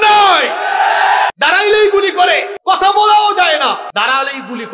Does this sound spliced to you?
yes; 3 cuts; at 1.3 s, 2.5 s, 3.9 s

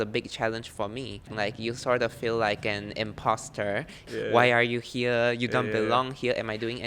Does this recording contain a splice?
yes; 2 cuts; at 1.3 s, 4.1 s

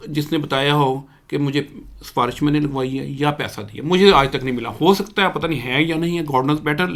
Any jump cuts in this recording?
no; 0 cuts

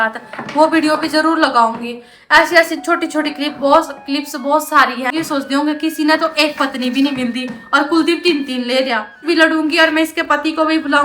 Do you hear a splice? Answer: yes; 2 cuts; at 5.1 s, 9.2 s

